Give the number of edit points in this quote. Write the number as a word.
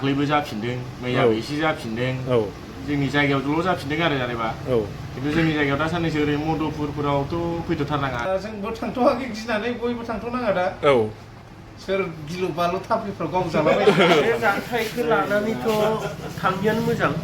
two